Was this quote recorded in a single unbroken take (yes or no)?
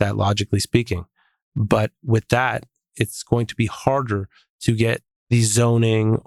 no